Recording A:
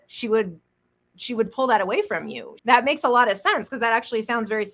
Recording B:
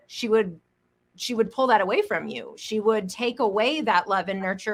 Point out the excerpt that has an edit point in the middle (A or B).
A